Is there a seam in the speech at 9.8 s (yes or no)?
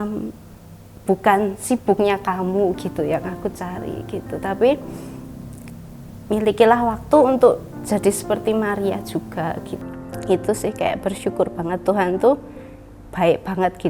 yes